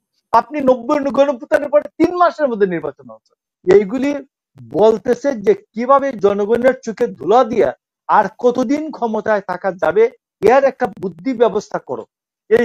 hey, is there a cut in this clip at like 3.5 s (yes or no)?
yes